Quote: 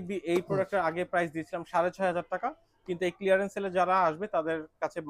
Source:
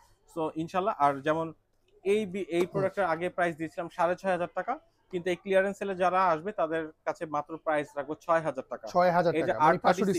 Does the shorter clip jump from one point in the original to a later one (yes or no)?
no